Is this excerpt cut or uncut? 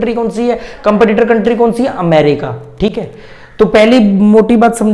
uncut